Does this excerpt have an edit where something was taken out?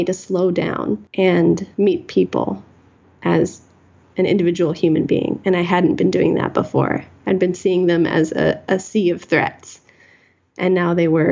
yes; 2 cuts; at 1.1 s, 1.7 s

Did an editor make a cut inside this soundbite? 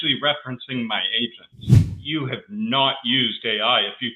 yes; 1 cut; at 1.9 s

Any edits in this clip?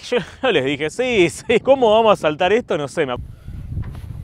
yes; 1 cut; at 3.1 s

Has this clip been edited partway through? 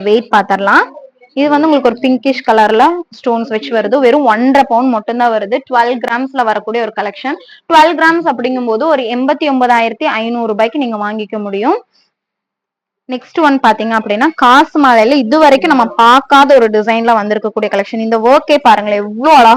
no; 0 cuts

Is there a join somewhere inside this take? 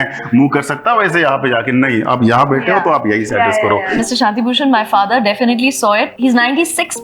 yes; 2 cuts; at 4.0 s, 6.1 s

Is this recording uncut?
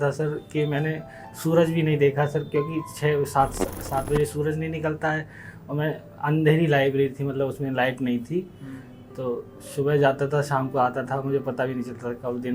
yes; 0 cuts

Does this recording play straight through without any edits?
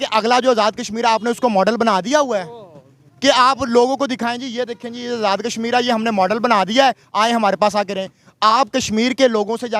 yes; 0 cuts

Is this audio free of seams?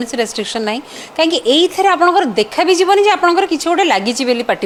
yes; 0 cuts

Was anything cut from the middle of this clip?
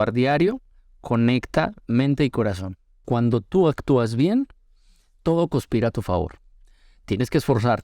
yes; 1 cut; at 3.1 s

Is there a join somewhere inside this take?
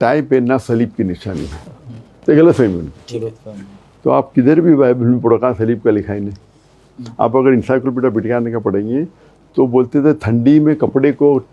no; 0 cuts

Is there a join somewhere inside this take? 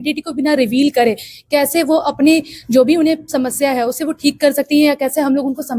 no; 0 cuts

